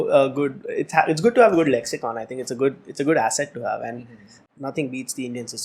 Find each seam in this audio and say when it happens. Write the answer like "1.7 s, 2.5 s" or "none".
4.3 s